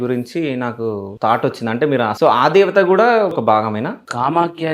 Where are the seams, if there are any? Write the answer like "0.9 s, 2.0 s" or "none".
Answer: 1.1 s, 2.1 s, 3.6 s